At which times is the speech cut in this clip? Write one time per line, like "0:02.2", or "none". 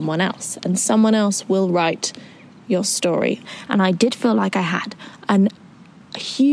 0:03.5

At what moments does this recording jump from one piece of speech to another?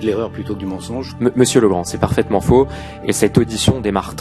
none

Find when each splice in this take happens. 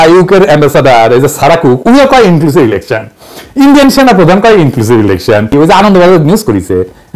0:05.5

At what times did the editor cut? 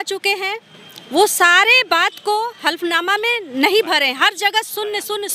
none

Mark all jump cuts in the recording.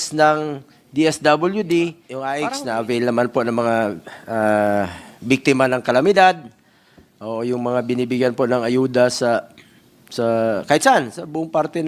0:02.3

